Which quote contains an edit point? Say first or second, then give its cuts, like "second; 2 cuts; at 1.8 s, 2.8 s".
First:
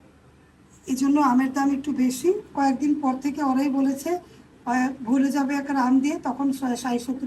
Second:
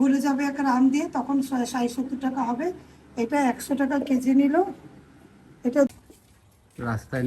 second; 1 cut; at 5.9 s